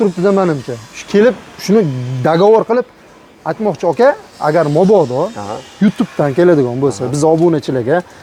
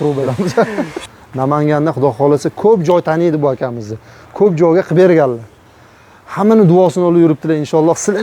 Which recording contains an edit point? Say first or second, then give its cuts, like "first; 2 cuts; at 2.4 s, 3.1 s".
second; 1 cut; at 1.0 s